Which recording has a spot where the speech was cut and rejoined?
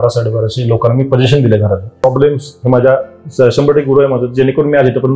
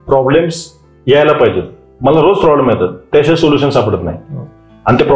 first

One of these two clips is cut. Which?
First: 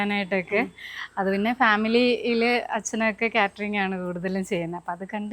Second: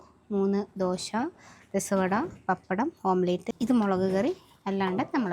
second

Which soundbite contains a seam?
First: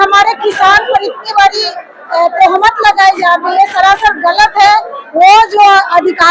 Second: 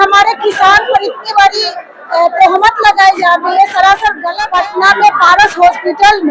second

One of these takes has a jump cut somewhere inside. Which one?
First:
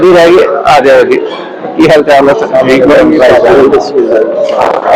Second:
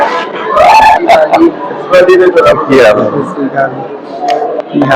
second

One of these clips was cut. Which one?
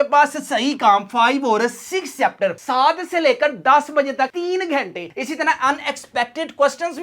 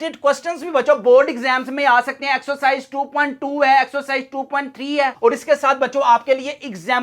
first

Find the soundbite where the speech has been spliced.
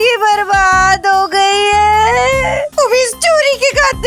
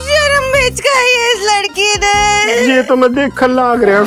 first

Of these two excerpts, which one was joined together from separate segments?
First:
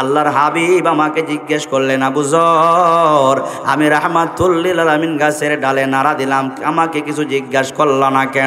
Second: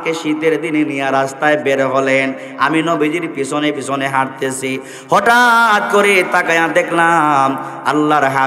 first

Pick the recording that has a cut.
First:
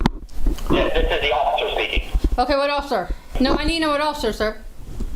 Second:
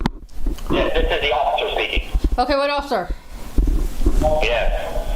first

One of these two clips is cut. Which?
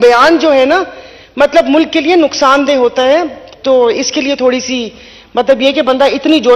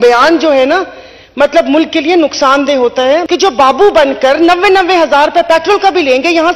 second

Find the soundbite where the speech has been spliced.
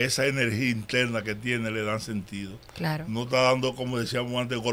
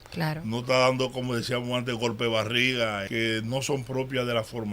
second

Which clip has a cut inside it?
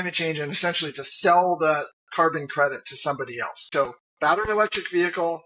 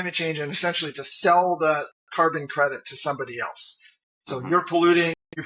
first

